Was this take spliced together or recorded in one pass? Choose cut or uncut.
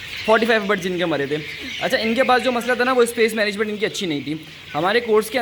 uncut